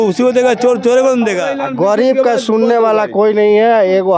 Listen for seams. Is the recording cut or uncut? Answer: cut